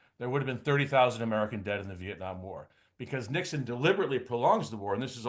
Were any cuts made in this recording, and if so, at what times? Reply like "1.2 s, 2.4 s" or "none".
none